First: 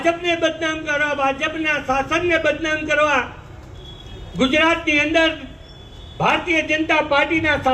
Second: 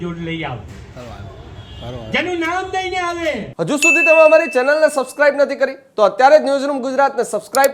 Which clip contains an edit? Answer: second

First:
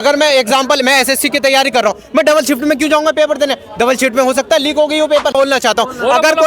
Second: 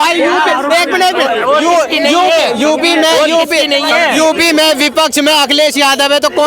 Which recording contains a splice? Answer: first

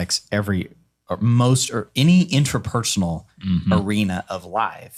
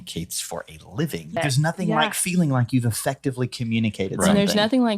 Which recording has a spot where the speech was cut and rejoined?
second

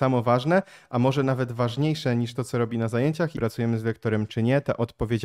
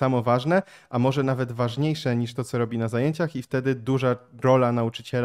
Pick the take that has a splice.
first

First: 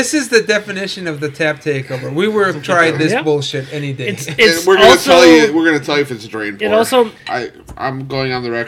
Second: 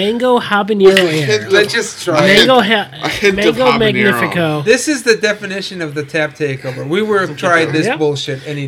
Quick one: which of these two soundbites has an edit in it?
first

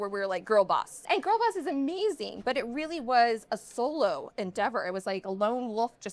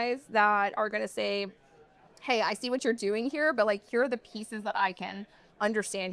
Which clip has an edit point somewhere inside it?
first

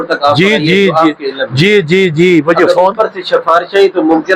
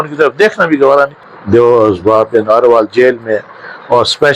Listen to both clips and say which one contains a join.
second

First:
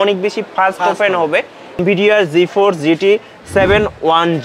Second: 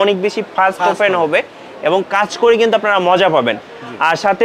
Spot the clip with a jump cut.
first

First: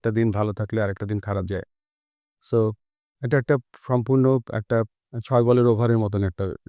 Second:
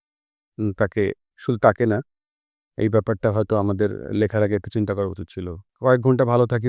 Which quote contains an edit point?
second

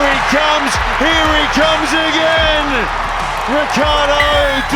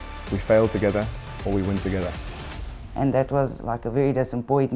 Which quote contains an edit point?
second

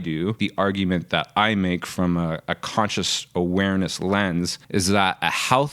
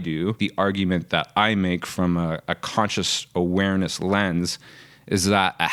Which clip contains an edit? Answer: first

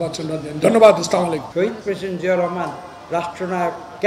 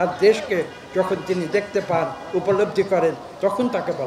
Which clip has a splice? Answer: first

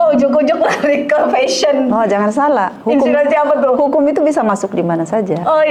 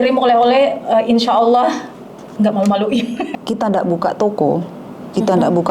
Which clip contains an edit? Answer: second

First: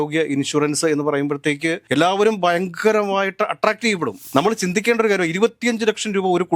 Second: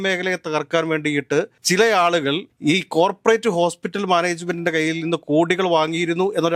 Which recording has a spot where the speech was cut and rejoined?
first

